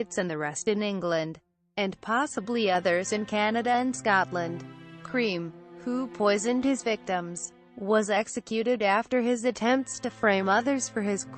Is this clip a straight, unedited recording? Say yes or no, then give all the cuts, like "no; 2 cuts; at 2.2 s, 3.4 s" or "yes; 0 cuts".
yes; 0 cuts